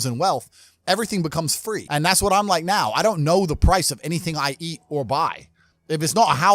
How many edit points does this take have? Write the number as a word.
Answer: one